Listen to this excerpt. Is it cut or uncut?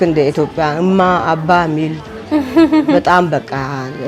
uncut